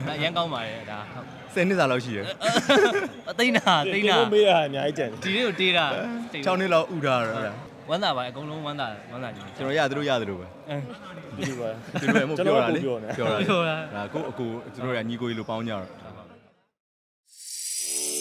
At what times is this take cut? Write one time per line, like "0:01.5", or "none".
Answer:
0:16.6